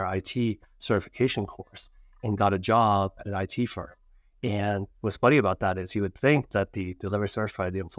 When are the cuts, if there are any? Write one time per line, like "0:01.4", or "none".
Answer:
none